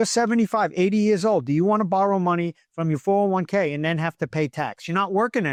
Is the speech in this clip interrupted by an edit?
no; 0 cuts

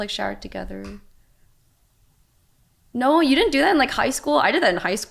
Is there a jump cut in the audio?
no; 0 cuts

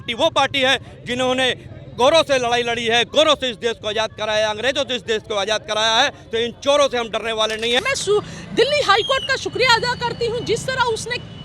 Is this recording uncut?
no; 1 cut; at 7.8 s

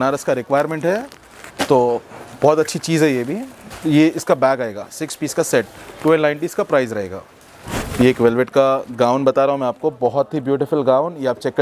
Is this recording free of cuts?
yes; 0 cuts

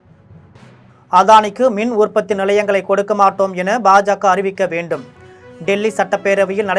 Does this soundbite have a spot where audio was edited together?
yes; 1 cut; at 1.1 s

